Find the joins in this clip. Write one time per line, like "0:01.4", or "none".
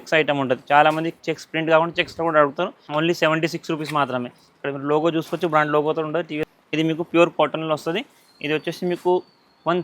0:02.8
0:06.5